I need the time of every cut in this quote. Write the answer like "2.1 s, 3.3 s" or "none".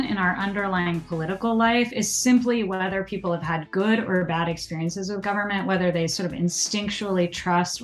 none